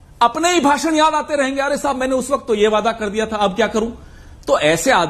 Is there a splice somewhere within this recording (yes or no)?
yes